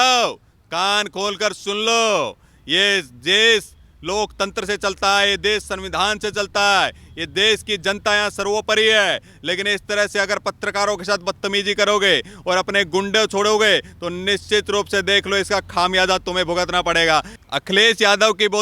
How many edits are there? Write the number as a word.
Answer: one